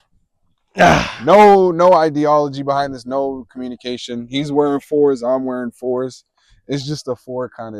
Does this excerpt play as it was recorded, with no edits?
yes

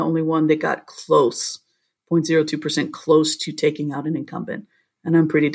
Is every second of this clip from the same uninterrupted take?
yes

